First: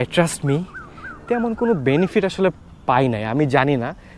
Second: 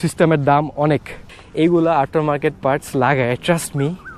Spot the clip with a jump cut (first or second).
second